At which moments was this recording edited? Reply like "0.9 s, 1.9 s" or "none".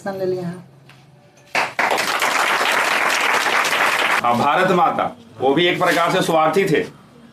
4.2 s